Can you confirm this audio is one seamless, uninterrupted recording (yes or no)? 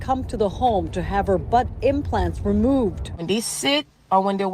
no